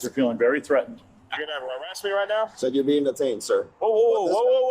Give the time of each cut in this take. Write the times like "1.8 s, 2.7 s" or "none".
1.0 s, 2.5 s